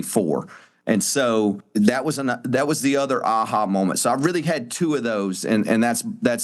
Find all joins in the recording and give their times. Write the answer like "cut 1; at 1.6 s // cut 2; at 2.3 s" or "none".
cut 1; at 1.6 s